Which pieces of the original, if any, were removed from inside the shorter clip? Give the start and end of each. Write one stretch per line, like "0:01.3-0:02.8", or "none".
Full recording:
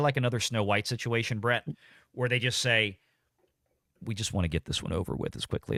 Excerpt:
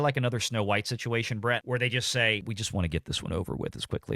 0:01.6-0:02.1
0:02.9-0:04.0